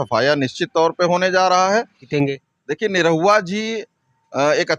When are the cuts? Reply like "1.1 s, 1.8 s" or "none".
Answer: 2.0 s